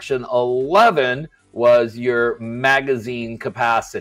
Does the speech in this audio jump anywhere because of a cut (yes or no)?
no